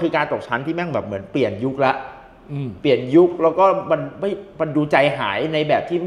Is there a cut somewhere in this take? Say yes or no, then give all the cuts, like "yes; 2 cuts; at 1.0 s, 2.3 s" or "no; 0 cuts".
no; 0 cuts